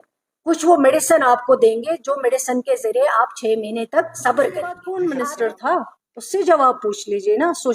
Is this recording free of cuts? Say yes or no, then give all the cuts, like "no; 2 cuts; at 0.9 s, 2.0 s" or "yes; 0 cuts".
no; 1 cut; at 4.8 s